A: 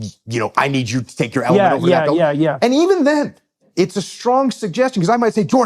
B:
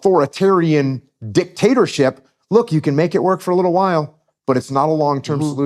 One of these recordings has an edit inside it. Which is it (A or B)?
A